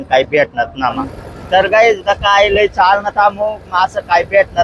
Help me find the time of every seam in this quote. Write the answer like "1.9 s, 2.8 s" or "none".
1.1 s